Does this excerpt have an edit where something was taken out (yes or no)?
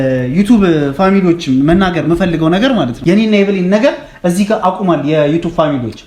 yes